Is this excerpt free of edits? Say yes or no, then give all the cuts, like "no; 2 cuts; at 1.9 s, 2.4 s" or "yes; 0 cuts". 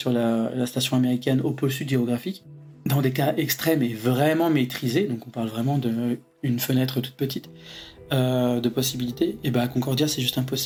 yes; 0 cuts